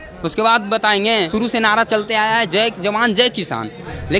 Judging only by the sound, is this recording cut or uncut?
cut